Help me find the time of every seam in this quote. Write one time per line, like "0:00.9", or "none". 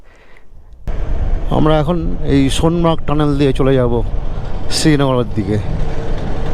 0:00.9